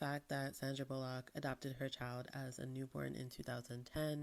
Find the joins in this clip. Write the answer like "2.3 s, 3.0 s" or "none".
none